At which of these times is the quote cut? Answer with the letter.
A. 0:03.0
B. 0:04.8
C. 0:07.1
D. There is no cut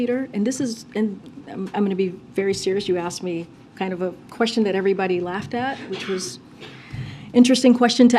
D